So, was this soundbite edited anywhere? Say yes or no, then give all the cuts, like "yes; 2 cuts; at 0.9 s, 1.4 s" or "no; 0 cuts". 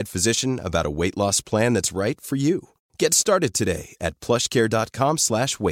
no; 0 cuts